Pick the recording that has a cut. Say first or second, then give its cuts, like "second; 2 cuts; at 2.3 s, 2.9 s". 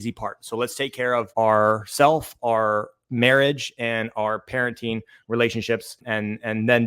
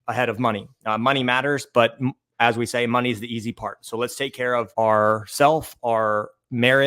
first; 1 cut; at 5.9 s